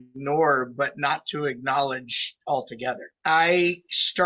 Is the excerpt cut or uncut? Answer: cut